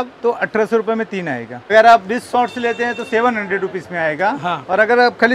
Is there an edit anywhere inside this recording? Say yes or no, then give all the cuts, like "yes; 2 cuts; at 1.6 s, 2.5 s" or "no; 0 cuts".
yes; 1 cut; at 1.7 s